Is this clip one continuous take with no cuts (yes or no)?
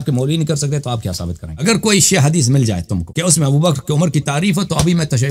no